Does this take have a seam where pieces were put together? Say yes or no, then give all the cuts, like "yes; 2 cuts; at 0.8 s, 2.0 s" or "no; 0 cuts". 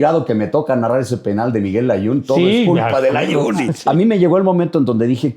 yes; 1 cut; at 3.7 s